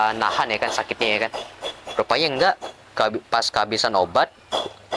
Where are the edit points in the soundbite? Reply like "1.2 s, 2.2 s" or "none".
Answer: none